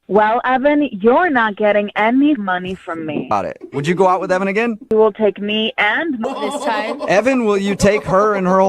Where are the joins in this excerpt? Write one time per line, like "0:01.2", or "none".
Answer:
0:03.3
0:04.9
0:06.2